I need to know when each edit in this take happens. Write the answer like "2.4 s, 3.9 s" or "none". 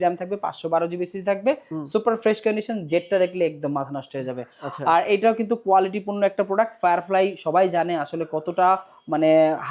none